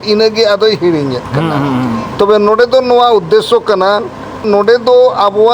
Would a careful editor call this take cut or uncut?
cut